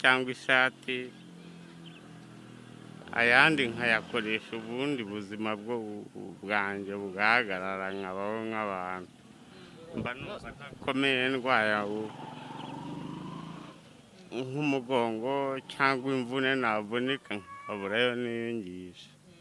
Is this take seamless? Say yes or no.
yes